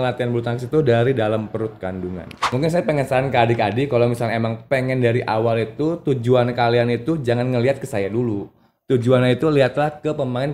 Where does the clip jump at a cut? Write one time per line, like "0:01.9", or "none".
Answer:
0:02.6